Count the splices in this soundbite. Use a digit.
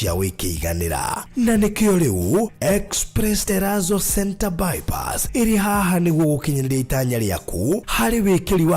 1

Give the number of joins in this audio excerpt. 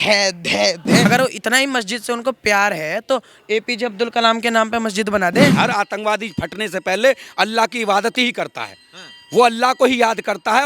2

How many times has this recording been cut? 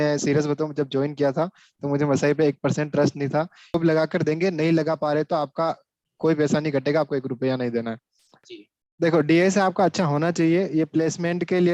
2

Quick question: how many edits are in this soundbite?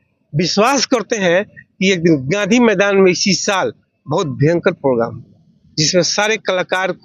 0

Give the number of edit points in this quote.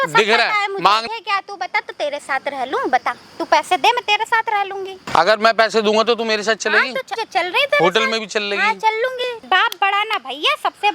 4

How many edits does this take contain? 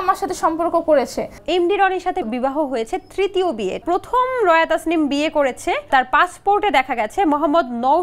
4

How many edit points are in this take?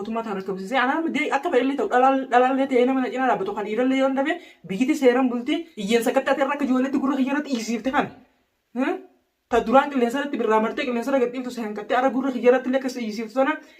1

